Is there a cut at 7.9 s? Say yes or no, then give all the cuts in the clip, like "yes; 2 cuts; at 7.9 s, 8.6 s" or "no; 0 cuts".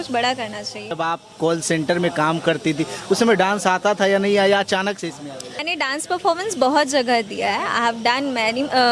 no; 2 cuts; at 0.9 s, 5.6 s